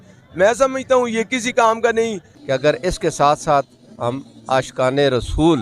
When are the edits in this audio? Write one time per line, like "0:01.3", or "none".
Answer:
0:02.3